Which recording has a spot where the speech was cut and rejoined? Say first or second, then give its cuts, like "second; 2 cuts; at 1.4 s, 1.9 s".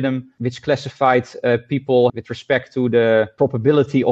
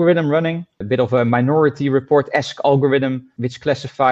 first; 1 cut; at 2.1 s